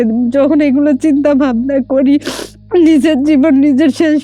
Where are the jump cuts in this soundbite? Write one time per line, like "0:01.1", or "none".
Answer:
none

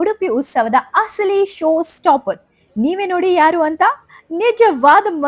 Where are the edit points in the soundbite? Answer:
none

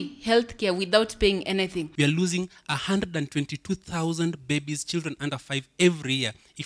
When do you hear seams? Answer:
0:01.9

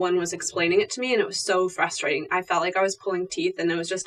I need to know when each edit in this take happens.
none

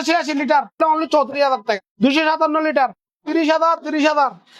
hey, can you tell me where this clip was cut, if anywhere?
0:00.8
0:01.9

